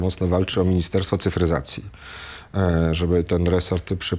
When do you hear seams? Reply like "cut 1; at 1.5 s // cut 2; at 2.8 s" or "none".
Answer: none